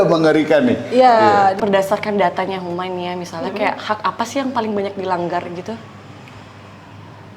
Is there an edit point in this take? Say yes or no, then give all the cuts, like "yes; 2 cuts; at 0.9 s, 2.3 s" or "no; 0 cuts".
yes; 1 cut; at 1.6 s